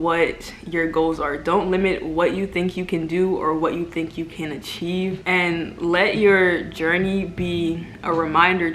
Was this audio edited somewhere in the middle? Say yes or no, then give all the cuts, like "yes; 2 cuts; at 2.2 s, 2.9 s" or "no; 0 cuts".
yes; 1 cut; at 5.2 s